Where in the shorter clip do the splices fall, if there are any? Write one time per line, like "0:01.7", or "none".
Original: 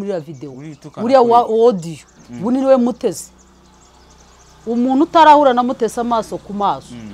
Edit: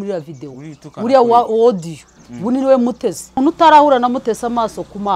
0:03.4